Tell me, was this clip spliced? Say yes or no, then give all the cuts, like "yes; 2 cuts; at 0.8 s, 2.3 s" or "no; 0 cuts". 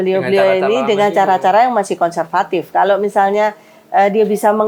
no; 0 cuts